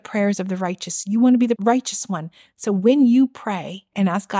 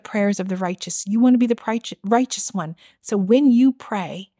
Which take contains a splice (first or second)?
first